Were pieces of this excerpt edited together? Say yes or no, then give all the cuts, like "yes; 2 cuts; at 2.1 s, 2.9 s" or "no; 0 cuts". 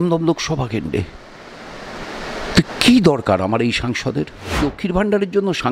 yes; 1 cut; at 4.6 s